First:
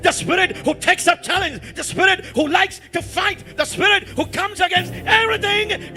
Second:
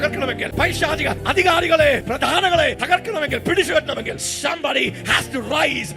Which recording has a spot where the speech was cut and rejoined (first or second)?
second